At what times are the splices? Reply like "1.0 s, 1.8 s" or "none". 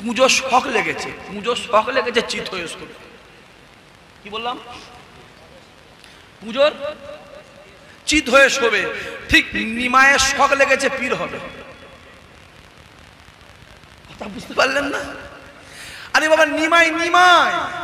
none